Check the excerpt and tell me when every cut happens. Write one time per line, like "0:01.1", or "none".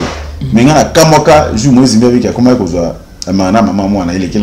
none